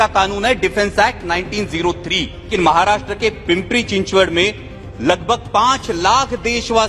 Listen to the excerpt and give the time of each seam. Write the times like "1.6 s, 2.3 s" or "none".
2.5 s